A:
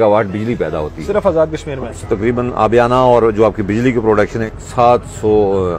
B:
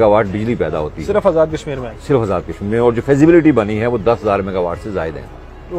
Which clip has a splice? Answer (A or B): A